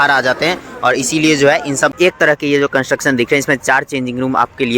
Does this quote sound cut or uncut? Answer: cut